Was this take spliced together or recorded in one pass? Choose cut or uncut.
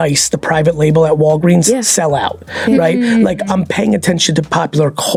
uncut